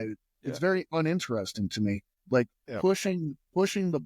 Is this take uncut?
no; 1 cut; at 2.1 s

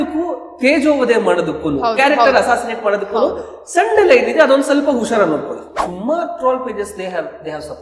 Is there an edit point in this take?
yes; 1 cut; at 5.8 s

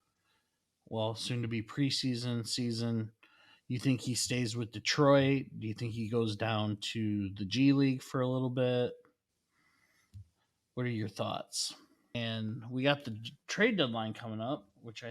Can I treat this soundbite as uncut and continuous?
no; 1 cut; at 12.1 s

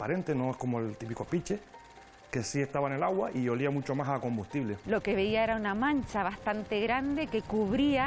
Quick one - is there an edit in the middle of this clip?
yes; 1 cut; at 4.8 s

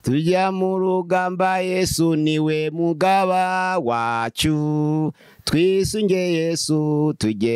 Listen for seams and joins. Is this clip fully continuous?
yes; 0 cuts

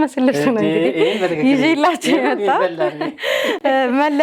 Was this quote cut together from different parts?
no; 0 cuts

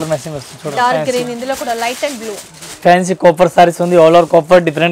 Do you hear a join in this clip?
yes; 1 cut; at 2.8 s

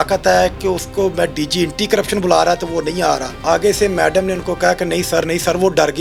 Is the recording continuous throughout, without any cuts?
yes; 0 cuts

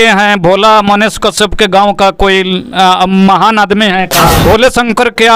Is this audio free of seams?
no; 1 cut; at 4.4 s

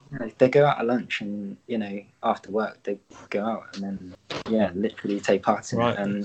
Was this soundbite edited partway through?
yes; 1 cut; at 4.1 s

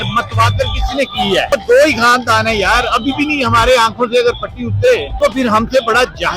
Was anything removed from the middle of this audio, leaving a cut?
yes; 2 cuts; at 1.5 s, 5.1 s

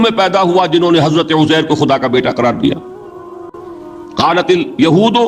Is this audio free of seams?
yes; 0 cuts

